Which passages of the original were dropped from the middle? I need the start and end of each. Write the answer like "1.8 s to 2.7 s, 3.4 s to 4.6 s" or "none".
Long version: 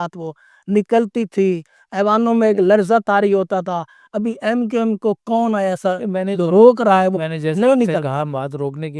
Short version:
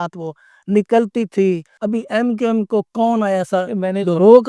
1.7 s to 4.0 s